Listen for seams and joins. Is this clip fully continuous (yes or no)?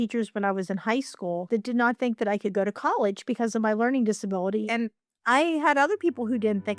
no